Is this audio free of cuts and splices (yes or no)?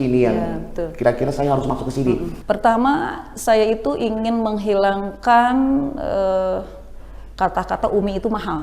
no